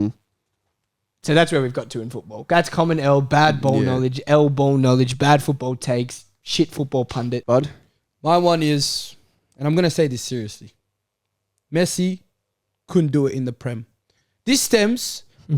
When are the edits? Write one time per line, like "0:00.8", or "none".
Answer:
0:07.4